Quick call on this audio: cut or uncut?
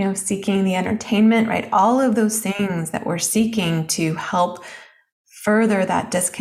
uncut